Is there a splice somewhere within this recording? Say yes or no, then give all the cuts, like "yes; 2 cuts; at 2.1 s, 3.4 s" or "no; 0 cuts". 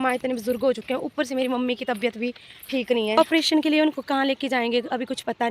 yes; 1 cut; at 3.2 s